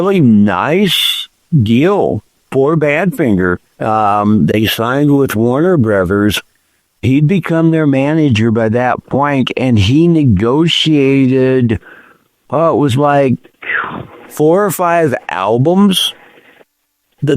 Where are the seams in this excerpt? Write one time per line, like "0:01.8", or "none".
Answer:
0:03.7